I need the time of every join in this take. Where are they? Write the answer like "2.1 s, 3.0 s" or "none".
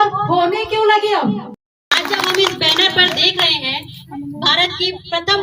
1.9 s